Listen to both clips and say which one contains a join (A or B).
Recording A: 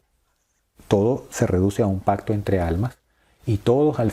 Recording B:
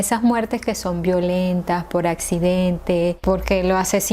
B